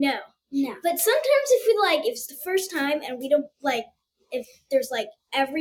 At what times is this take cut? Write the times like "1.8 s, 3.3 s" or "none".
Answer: none